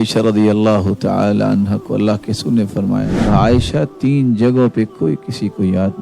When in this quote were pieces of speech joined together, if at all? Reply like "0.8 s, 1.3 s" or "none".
3.1 s